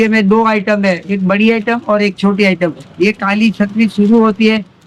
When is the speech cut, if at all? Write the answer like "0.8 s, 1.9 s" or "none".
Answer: none